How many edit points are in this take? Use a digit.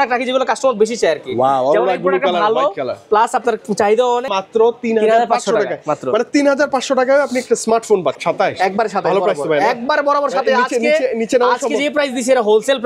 2